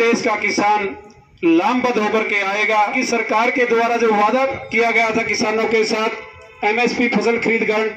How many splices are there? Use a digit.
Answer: 1